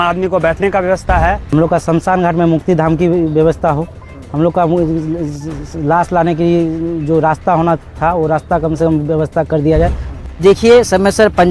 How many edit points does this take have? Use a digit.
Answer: 2